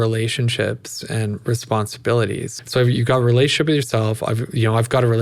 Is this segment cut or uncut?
cut